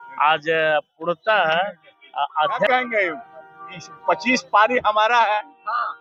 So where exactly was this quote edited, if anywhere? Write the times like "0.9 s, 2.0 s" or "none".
2.7 s